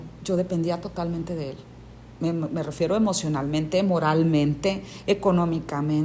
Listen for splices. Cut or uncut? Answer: uncut